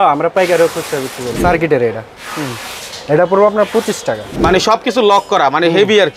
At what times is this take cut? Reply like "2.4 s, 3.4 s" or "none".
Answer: 1.3 s, 4.3 s